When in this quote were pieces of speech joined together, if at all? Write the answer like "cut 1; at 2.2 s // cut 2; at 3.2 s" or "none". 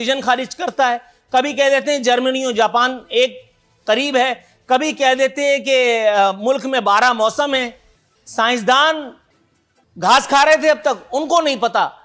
none